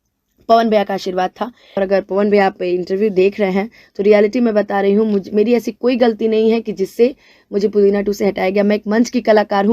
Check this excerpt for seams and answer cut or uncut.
cut